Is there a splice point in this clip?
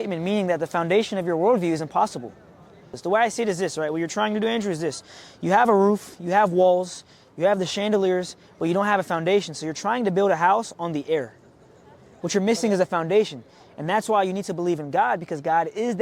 yes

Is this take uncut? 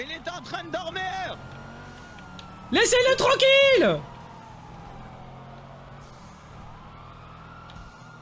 yes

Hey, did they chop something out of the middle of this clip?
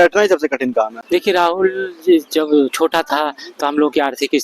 yes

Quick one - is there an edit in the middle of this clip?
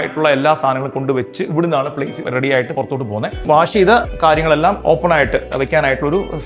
yes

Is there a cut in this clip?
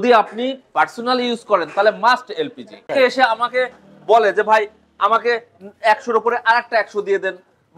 yes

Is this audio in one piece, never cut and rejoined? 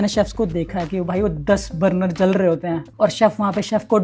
no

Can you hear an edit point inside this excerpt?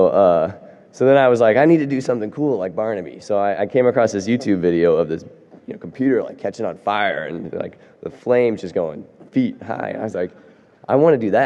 no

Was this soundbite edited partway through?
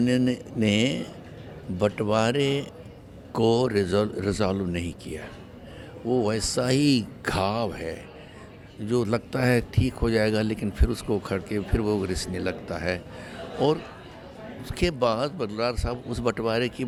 no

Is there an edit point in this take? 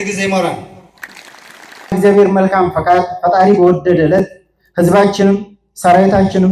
yes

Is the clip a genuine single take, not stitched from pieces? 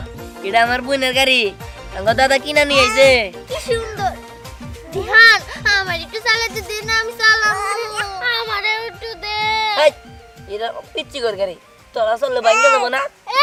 yes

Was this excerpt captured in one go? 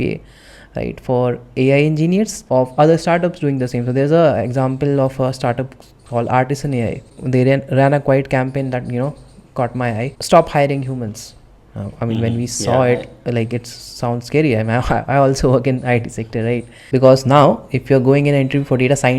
no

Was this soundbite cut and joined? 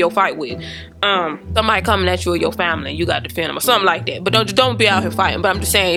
no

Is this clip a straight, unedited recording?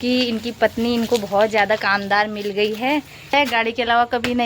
no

